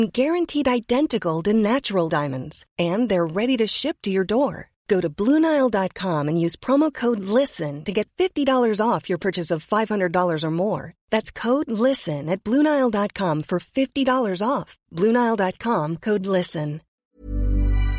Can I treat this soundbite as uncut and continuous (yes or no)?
no